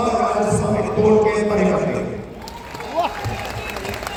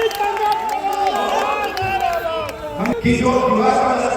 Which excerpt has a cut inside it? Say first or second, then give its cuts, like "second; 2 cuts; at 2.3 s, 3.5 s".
second; 1 cut; at 2.9 s